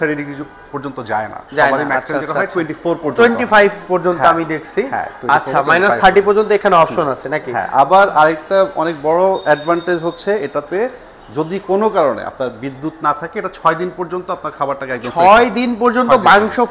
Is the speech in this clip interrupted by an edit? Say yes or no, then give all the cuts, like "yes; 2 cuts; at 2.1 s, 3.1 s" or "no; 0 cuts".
no; 0 cuts